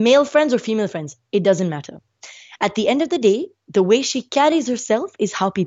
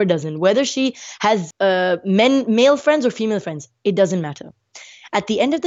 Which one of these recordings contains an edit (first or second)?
second